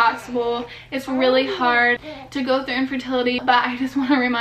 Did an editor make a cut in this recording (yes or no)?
yes